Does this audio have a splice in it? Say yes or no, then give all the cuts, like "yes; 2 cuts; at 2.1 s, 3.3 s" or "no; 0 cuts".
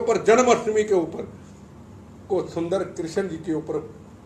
no; 0 cuts